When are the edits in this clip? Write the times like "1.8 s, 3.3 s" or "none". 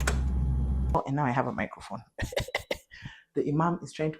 0.9 s